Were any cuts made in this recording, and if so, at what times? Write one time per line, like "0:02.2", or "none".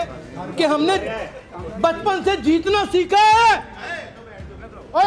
none